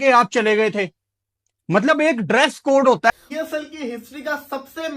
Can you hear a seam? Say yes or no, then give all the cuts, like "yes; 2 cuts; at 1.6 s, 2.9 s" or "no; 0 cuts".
yes; 1 cut; at 3.1 s